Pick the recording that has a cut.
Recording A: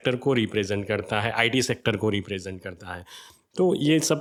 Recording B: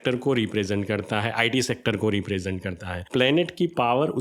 B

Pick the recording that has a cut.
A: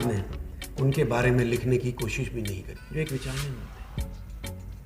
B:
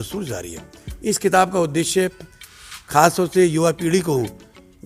A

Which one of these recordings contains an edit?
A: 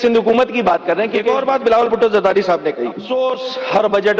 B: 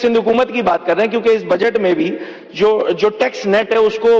A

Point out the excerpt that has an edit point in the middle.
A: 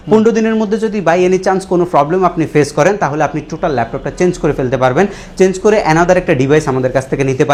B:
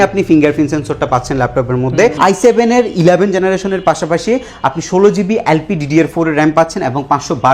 B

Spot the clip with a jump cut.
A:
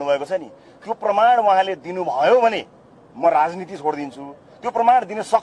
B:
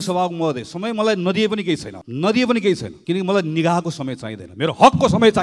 B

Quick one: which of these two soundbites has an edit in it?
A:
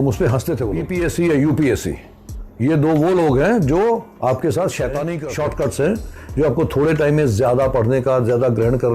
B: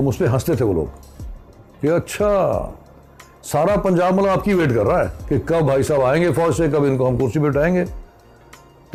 A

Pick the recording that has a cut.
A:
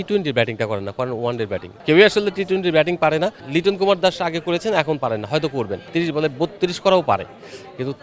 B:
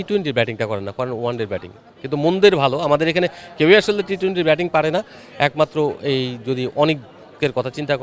A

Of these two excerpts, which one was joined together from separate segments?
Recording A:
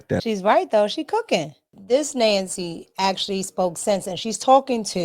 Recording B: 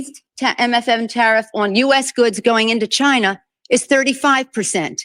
A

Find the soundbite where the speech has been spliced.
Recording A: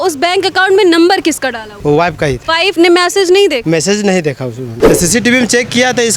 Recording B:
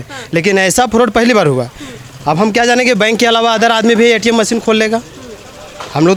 A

